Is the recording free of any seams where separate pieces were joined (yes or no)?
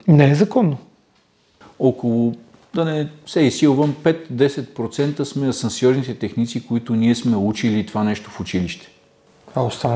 no